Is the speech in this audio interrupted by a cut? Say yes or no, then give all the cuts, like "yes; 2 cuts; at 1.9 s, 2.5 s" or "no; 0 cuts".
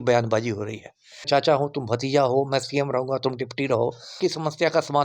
yes; 2 cuts; at 1.2 s, 4.2 s